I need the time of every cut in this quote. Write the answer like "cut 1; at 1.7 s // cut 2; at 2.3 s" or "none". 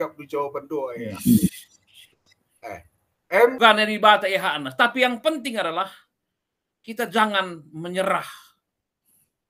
cut 1; at 3.6 s